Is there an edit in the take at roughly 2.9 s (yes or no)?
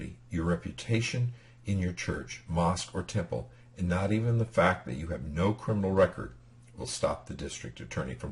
yes